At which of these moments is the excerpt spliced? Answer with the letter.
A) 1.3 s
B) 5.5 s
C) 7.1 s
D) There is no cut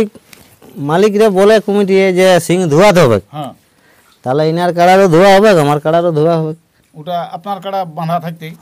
D